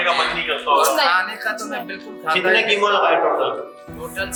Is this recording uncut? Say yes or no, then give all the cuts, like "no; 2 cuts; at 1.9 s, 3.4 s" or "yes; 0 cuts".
yes; 0 cuts